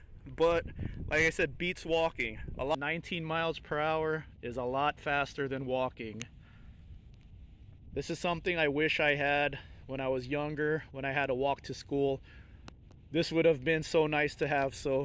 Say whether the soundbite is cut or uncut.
cut